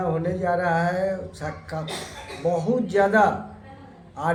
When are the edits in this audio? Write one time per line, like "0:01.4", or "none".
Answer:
none